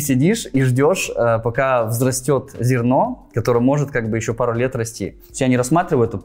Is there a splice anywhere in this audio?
yes; 1 cut; at 5.3 s

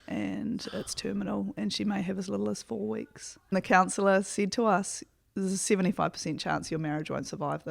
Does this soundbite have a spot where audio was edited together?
yes; 1 cut; at 3.6 s

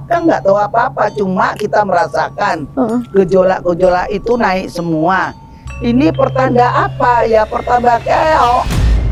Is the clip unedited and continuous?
yes; 0 cuts

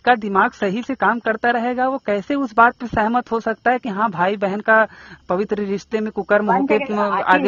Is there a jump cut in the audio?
no; 0 cuts

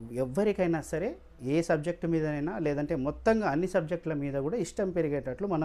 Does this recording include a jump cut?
no; 0 cuts

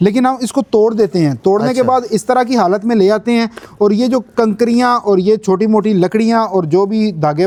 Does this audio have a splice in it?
no; 0 cuts

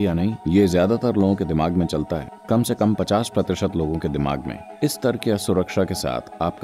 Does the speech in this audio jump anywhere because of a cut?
no; 0 cuts

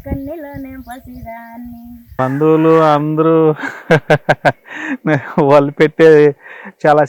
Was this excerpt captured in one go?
no; 1 cut; at 2.0 s

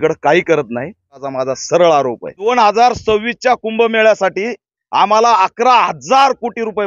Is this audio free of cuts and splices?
no; 2 cuts; at 1.2 s, 2.5 s

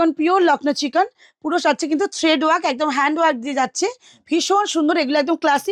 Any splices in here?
no; 0 cuts

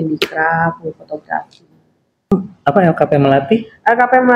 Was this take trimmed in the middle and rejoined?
yes; 1 cut; at 2.3 s

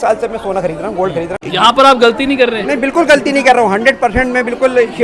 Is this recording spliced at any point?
yes; 1 cut; at 1.3 s

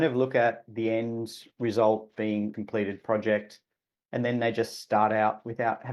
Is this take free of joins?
no; 1 cut; at 2.5 s

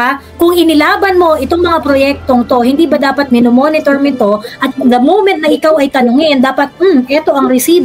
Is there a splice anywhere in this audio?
no; 0 cuts

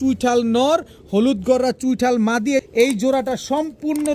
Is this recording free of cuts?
no; 1 cut; at 2.7 s

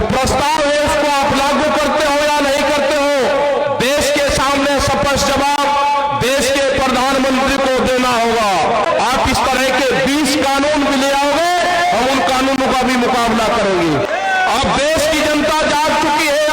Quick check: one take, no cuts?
no; 2 cuts; at 8.9 s, 14.1 s

